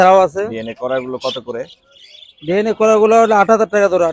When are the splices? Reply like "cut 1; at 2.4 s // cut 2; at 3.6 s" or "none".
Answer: none